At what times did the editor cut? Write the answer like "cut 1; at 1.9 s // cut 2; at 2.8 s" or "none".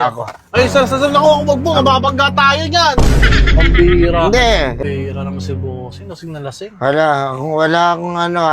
cut 1; at 4.8 s